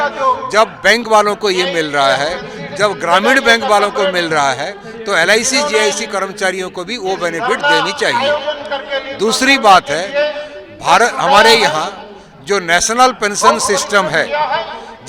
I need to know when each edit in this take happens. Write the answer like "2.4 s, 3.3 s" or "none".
none

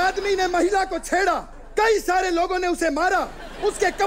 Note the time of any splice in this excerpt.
1.5 s

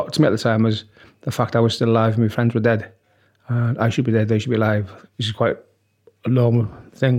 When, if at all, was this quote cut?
4.9 s

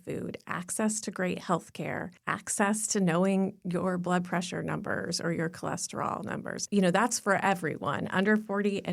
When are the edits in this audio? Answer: 2.1 s, 6.6 s

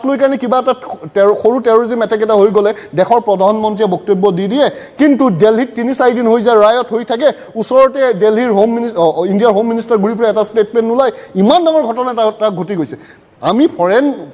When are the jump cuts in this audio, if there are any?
none

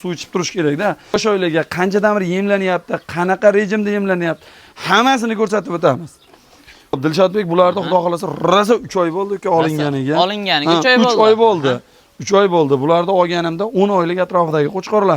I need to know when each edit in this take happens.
1.2 s, 7.0 s

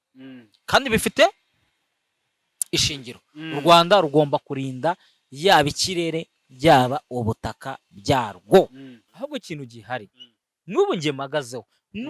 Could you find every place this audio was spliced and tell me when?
9.0 s

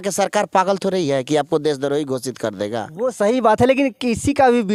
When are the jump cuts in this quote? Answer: none

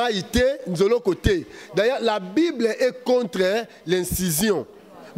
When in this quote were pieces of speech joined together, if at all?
none

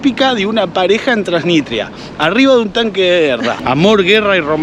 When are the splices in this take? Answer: none

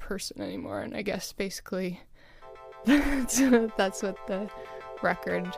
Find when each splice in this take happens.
none

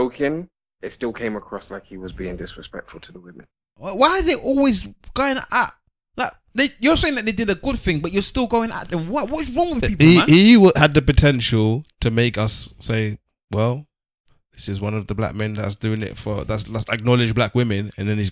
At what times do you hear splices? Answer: 3.5 s

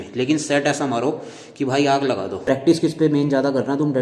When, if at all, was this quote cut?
2.4 s

